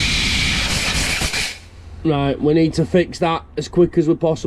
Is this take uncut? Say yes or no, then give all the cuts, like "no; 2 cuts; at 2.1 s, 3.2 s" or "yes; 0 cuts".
yes; 0 cuts